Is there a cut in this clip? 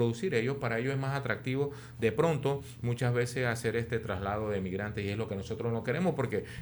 no; 0 cuts

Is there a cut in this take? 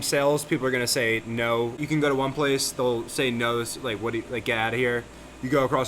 yes; 1 cut; at 1.8 s

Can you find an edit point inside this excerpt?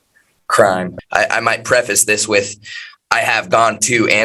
yes; 1 cut; at 1.0 s

